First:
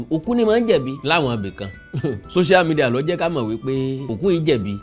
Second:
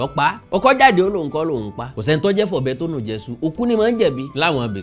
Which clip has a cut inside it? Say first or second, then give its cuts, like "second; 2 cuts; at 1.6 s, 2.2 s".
second; 1 cut; at 1.8 s